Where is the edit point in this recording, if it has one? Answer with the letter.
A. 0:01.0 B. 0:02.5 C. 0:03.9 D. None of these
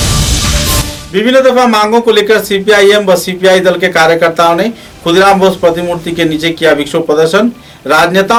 D